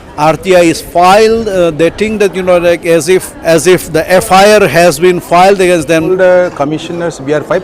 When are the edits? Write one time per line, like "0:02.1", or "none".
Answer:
0:03.3
0:06.1